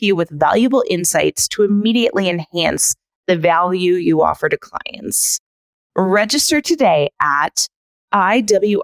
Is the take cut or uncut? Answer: cut